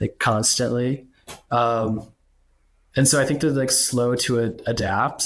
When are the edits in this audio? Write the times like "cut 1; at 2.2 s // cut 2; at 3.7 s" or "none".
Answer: none

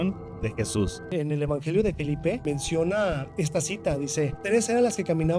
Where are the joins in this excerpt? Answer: cut 1; at 1.1 s // cut 2; at 2.4 s // cut 3; at 3.3 s // cut 4; at 4.4 s

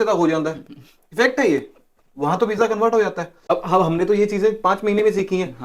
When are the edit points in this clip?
cut 1; at 3.4 s

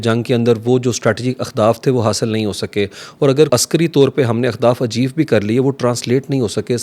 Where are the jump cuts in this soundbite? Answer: cut 1; at 3.5 s

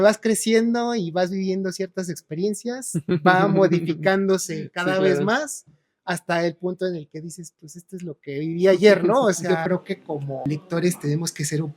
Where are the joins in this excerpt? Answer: cut 1; at 9.5 s // cut 2; at 10.4 s

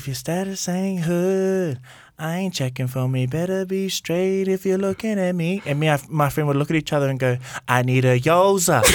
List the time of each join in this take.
none

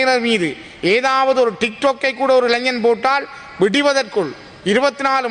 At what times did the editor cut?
none

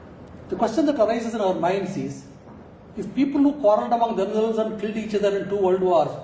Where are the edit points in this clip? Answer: cut 1; at 3.6 s

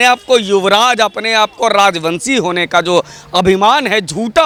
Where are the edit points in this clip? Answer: none

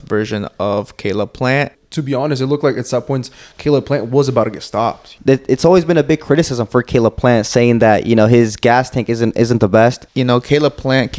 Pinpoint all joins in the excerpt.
cut 1; at 1.8 s // cut 2; at 5.1 s // cut 3; at 10.1 s

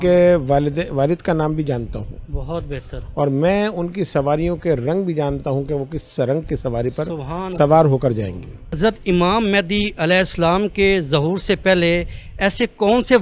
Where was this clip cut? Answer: cut 1; at 8.7 s

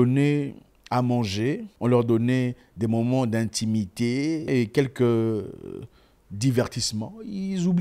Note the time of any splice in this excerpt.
cut 1; at 1.7 s // cut 2; at 4.5 s

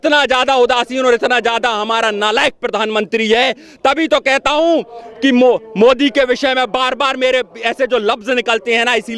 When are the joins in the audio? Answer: none

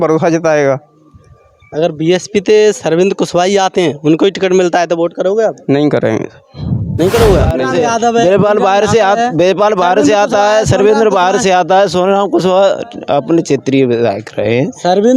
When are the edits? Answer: cut 1; at 7.6 s

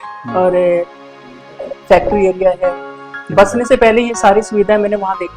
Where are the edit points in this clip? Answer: cut 1; at 3.2 s

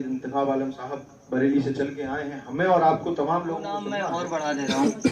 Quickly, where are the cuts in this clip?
cut 1; at 4.1 s

